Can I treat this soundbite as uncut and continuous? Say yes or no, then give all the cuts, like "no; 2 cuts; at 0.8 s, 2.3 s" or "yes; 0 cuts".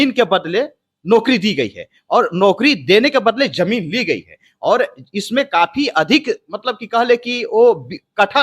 yes; 0 cuts